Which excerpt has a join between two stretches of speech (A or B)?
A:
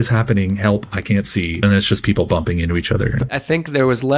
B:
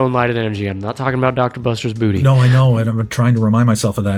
A